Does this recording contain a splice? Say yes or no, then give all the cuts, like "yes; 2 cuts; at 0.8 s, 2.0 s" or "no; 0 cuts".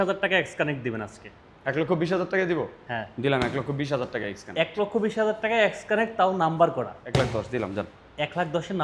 yes; 1 cut; at 7.0 s